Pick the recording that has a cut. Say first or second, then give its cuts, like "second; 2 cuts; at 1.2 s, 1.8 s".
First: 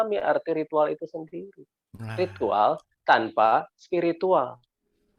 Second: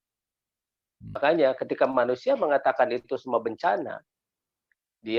second; 1 cut; at 1.2 s